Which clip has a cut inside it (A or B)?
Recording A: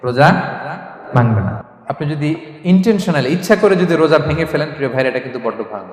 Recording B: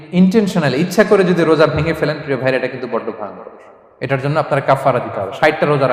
A